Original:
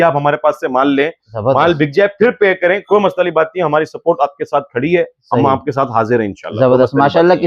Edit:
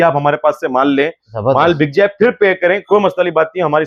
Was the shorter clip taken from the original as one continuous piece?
yes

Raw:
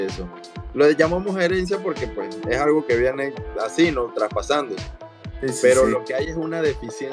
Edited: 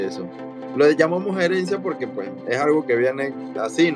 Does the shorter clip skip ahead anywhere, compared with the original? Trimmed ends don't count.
no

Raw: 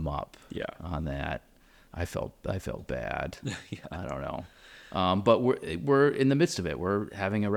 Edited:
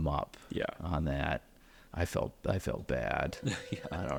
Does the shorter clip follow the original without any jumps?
yes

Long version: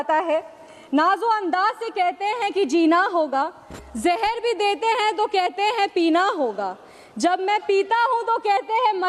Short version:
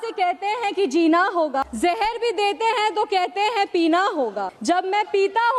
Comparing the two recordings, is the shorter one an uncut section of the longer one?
no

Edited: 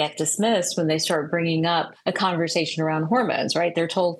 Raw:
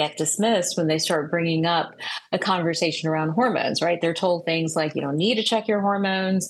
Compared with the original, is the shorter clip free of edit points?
no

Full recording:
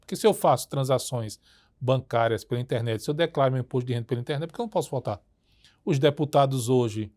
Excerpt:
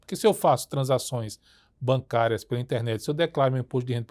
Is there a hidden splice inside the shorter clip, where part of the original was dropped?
no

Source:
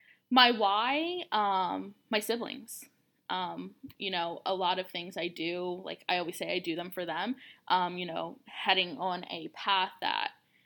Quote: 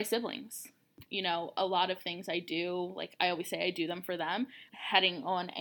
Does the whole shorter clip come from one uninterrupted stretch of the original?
no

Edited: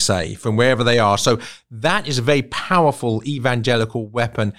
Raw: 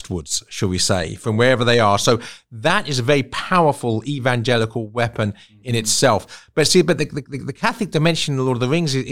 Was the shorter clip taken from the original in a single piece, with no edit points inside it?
yes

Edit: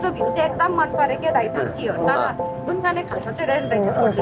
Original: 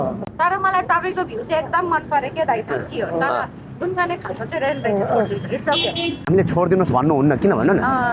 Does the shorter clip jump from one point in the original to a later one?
no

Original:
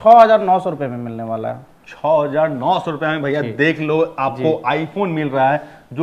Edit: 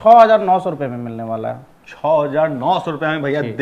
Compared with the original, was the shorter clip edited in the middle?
no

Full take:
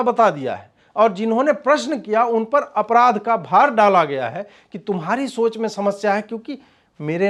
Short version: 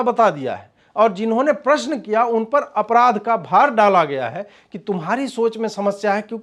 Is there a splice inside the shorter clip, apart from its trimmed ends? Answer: no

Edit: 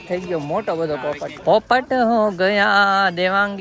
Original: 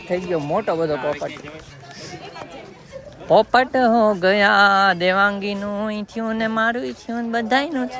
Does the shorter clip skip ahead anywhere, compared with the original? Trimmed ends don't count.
yes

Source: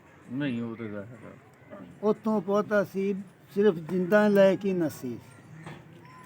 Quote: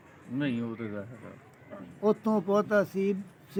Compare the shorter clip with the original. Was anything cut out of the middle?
no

